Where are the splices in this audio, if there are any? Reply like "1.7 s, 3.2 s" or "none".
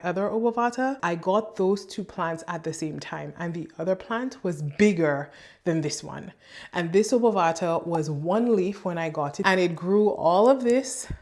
1.0 s, 9.3 s